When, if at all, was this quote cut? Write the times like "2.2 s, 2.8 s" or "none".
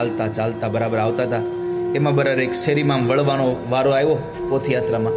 none